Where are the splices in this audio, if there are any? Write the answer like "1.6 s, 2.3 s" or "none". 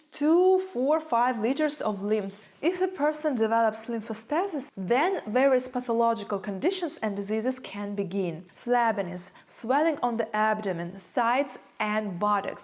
2.4 s, 4.6 s, 8.5 s